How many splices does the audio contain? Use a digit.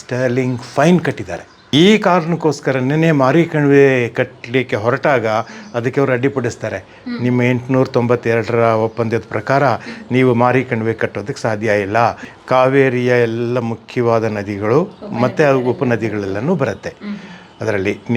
2